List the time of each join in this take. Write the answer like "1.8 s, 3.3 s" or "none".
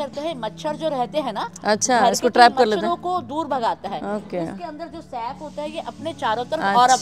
none